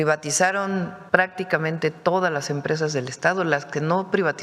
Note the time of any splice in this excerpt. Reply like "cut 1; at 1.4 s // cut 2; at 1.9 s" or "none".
cut 1; at 1.0 s